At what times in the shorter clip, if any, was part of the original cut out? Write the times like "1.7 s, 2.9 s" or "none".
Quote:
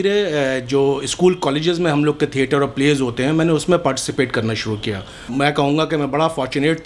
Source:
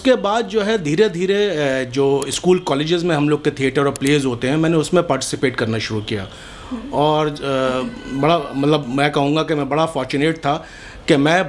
5.3 s